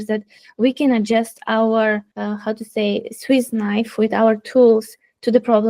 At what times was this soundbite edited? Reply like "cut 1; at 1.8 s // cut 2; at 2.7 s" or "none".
cut 1; at 2.1 s

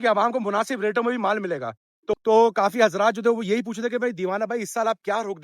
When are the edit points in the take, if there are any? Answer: cut 1; at 2.2 s

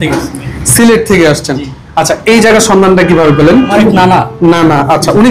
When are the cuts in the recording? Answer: cut 1; at 3.7 s

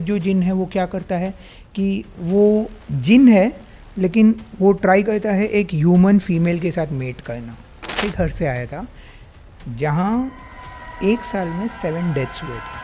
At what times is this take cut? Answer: cut 1; at 7.9 s

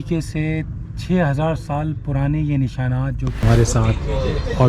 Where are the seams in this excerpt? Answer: cut 1; at 3.4 s

